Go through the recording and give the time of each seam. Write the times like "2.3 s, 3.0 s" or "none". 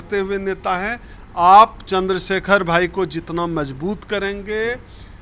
none